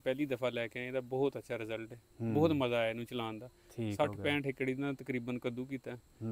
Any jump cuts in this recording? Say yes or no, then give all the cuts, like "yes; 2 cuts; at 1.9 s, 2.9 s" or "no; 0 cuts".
no; 0 cuts